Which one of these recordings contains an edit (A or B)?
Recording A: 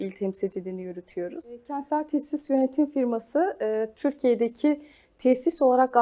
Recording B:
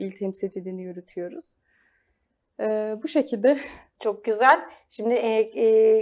A